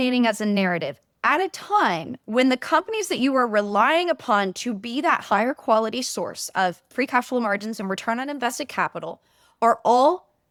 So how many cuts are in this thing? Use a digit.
0